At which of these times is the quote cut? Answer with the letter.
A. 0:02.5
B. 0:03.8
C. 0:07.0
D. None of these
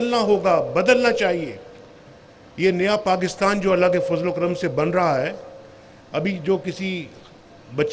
D